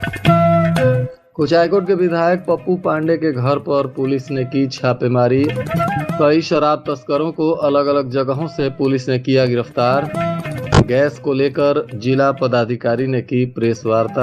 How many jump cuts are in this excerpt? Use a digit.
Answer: 1